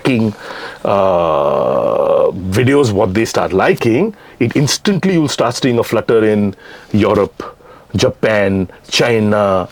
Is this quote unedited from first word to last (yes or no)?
yes